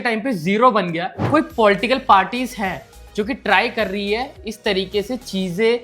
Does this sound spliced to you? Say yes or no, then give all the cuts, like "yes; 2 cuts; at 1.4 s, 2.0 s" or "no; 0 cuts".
yes; 1 cut; at 1.1 s